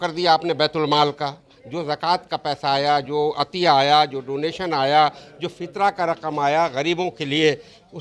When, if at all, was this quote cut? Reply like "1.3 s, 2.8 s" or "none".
none